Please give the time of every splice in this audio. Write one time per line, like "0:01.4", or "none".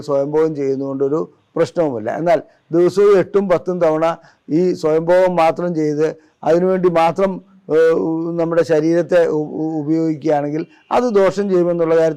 none

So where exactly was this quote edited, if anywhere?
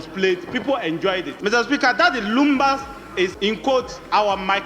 0:01.3
0:03.4

